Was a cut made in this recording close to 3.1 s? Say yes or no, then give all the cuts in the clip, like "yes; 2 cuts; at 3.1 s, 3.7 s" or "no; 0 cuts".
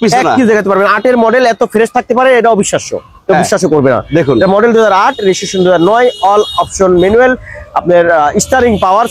no; 0 cuts